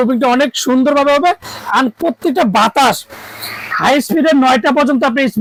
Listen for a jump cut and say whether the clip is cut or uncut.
uncut